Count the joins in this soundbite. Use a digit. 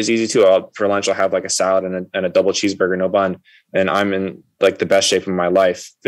0